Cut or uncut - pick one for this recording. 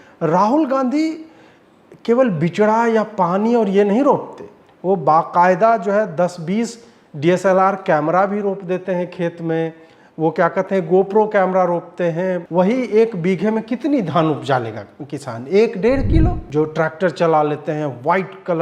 cut